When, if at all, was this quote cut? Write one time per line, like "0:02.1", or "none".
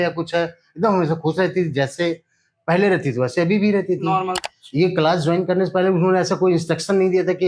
0:04.4